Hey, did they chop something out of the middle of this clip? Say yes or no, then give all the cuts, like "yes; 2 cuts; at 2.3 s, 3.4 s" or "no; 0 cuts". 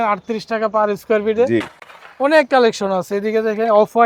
no; 0 cuts